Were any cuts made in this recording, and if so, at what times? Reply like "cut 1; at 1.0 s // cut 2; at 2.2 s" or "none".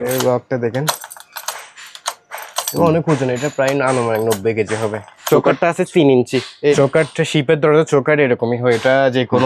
cut 1; at 5.1 s // cut 2; at 6.8 s

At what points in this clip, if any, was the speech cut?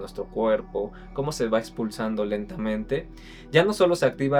none

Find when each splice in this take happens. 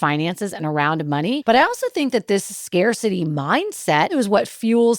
cut 1; at 1.4 s // cut 2; at 4.1 s

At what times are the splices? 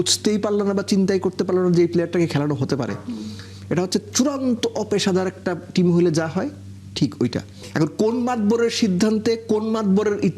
cut 1; at 7.6 s

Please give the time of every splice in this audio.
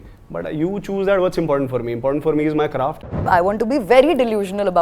cut 1; at 3.2 s

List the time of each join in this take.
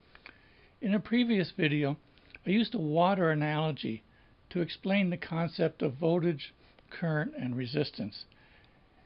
none

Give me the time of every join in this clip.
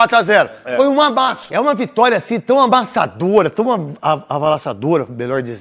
cut 1; at 1.4 s

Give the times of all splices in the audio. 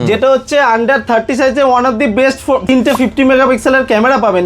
cut 1; at 2.7 s

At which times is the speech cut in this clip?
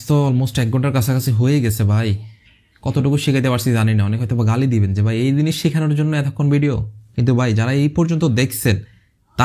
none

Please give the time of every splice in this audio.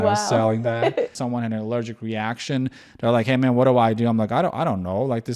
cut 1; at 1.2 s

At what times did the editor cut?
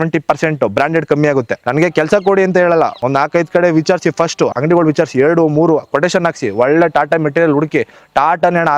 cut 1; at 1.6 s // cut 2; at 2.9 s // cut 3; at 4.5 s

